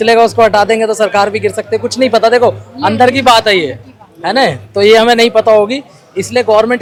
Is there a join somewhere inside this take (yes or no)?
no